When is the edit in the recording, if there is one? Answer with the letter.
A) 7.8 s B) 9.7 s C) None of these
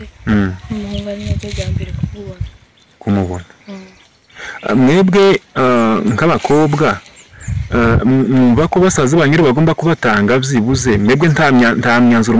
C